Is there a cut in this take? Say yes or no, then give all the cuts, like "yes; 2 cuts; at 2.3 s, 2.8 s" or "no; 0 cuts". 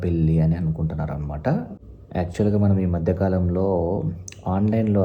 yes; 1 cut; at 1.7 s